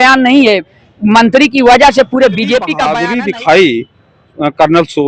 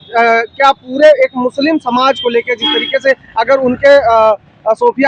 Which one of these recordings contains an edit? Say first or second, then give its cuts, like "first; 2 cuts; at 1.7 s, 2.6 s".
first; 1 cut; at 2.8 s